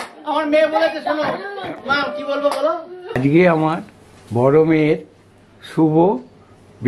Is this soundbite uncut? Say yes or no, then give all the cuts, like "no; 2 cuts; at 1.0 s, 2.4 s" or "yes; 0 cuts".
no; 1 cut; at 3.2 s